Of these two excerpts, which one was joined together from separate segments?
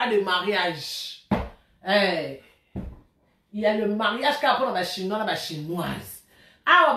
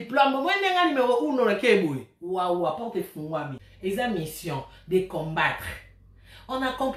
second; 1 cut; at 3.6 s

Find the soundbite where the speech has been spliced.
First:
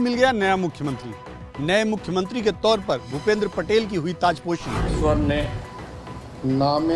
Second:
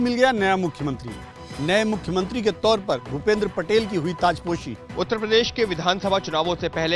second; 1 cut; at 4.7 s

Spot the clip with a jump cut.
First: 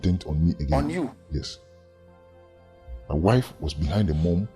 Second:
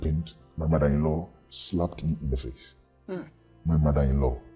first; 2 cuts; at 1.5 s, 3.1 s

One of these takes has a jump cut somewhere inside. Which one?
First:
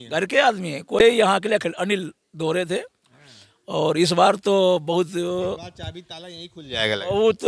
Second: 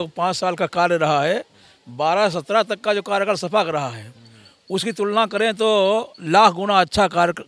first; 1 cut; at 1.0 s

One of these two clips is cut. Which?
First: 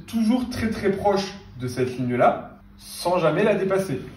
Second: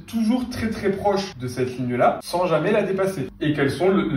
second; 3 cuts; at 1.4 s, 2.2 s, 3.3 s

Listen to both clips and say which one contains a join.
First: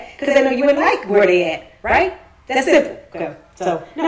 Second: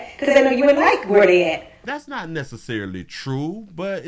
first; 1 cut; at 1.7 s

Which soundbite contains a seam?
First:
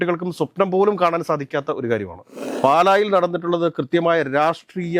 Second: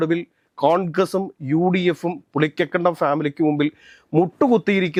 first; 1 cut; at 2.4 s

